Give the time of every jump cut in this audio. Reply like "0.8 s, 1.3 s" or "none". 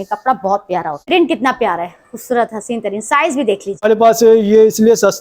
1.0 s, 3.8 s